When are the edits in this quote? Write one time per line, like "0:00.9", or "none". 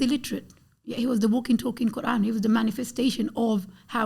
none